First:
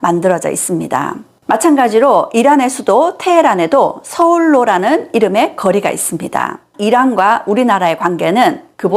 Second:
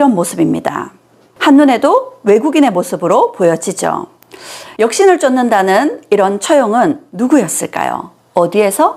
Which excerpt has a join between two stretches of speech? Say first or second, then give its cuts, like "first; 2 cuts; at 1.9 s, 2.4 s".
first; 2 cuts; at 1.3 s, 6.8 s